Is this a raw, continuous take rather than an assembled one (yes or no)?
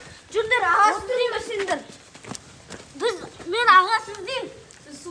yes